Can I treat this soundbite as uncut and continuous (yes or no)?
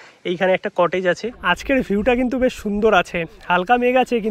no